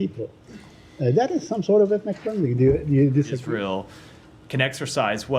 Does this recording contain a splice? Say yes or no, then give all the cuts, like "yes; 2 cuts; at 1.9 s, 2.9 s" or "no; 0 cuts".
yes; 1 cut; at 3.4 s